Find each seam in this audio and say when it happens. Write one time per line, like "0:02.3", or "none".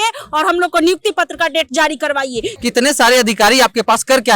0:02.5